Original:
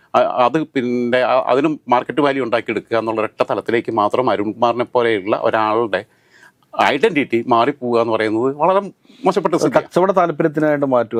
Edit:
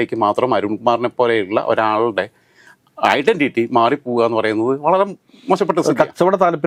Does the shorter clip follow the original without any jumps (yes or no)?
yes